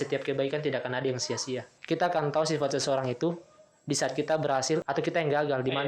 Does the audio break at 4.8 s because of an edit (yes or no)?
yes